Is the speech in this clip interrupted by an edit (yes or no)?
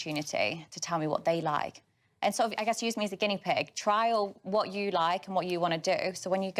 no